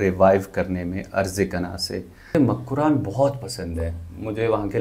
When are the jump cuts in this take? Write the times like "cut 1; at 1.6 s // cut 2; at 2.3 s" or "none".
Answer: cut 1; at 2.3 s